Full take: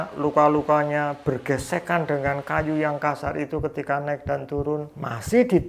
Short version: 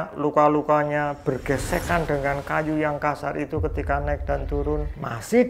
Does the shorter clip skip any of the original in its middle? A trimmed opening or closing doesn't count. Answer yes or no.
no